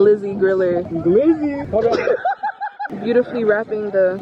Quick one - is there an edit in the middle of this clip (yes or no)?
yes